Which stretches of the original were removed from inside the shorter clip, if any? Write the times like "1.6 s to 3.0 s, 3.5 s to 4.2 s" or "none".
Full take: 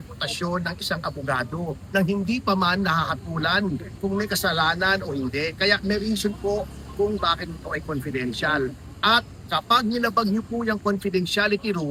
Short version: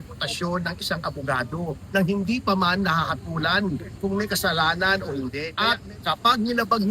5.5 s to 8.9 s